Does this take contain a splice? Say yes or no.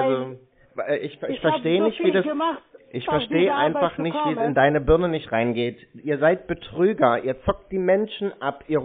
no